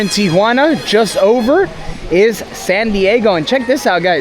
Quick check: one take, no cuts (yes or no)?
yes